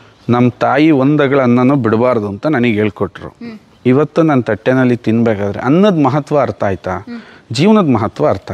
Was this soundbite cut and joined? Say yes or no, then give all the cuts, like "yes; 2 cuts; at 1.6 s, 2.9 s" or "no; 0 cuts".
no; 0 cuts